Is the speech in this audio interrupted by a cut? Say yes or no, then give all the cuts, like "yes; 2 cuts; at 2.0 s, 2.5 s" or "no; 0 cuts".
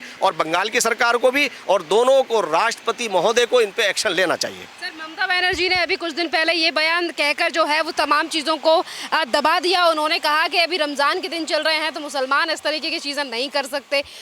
no; 0 cuts